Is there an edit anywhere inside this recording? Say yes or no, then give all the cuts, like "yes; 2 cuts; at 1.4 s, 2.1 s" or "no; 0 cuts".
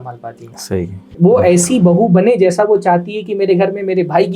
yes; 1 cut; at 1.0 s